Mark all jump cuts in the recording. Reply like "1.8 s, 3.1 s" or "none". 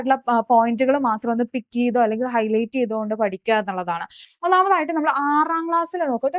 4.2 s